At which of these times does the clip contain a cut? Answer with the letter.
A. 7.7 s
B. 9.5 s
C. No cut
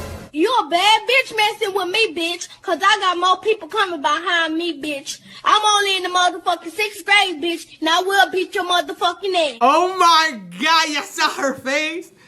B